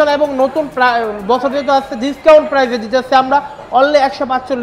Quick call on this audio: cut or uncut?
uncut